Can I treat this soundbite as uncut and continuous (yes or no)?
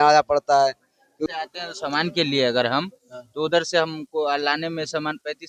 no